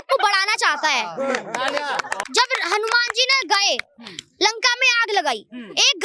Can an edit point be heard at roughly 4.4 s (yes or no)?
no